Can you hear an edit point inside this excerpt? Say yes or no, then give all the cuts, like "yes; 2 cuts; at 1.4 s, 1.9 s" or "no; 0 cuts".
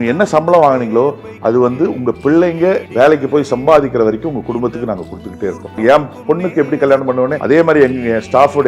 yes; 2 cuts; at 5.8 s, 7.4 s